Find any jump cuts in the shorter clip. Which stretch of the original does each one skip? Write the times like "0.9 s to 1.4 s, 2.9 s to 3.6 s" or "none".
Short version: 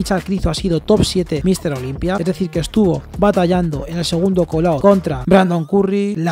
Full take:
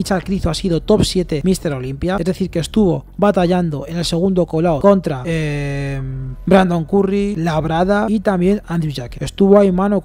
5.1 s to 6.3 s